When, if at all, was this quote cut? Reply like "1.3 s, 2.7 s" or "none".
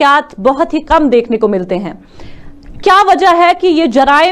none